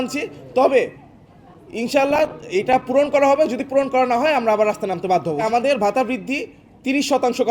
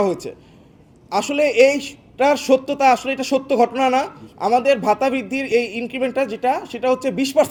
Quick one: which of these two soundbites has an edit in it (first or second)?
first